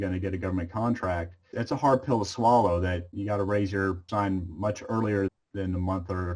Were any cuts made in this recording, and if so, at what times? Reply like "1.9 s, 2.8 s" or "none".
1.5 s, 3.1 s, 4.0 s, 5.3 s

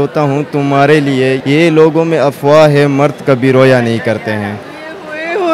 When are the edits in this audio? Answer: 1.4 s

